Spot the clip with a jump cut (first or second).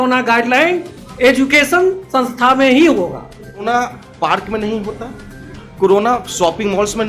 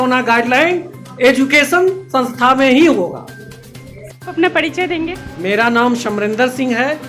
first